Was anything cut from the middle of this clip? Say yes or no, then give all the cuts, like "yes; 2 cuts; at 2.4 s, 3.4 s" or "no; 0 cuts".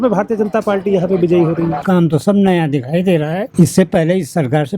yes; 2 cuts; at 1.8 s, 3.4 s